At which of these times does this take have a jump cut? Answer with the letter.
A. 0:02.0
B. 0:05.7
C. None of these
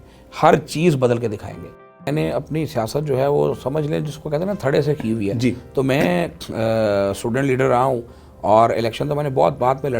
A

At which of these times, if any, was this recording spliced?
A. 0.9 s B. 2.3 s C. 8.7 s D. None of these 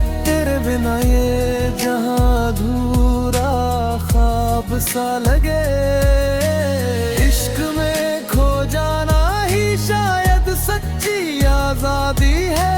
D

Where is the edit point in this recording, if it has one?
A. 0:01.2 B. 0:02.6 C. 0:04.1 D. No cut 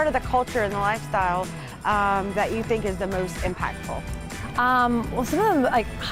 D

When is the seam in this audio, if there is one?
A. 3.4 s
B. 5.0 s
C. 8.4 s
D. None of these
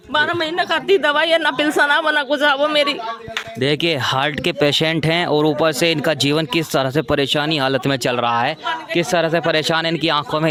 D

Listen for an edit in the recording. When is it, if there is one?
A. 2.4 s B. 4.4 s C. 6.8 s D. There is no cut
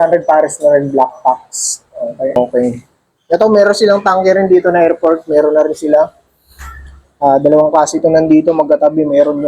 A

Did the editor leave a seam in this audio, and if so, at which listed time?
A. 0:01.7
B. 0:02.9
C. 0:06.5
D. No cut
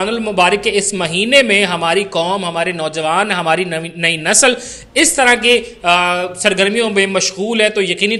D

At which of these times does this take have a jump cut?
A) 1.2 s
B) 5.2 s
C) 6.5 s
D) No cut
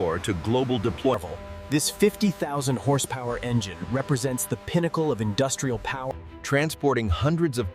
A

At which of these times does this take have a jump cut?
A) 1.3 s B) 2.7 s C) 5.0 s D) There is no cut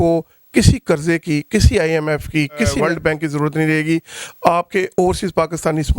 B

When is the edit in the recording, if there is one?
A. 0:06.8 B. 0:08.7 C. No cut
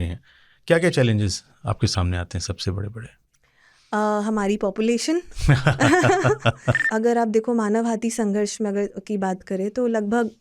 A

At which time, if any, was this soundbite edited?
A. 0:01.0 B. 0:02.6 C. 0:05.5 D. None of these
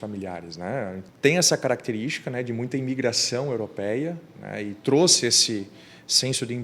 A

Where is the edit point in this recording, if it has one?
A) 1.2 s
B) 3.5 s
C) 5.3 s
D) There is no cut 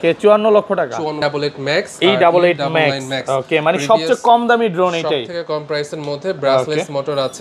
A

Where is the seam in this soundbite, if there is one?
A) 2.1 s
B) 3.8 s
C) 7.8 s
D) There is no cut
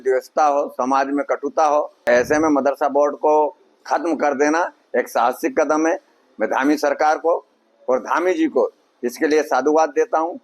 A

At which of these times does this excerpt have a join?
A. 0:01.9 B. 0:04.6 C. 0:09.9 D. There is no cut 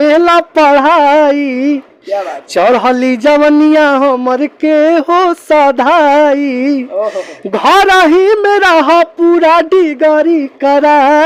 D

